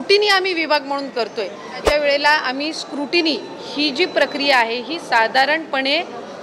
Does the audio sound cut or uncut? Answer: cut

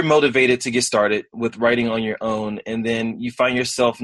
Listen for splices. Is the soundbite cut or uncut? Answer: uncut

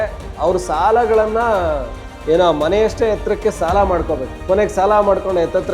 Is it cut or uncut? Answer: cut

